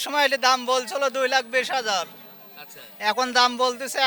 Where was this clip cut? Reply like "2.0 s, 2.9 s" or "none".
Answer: none